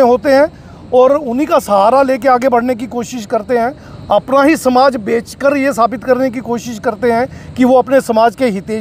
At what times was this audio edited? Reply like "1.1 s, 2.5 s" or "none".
none